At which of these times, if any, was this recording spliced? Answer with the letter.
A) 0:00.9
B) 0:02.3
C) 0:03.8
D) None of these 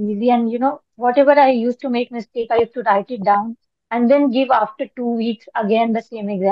D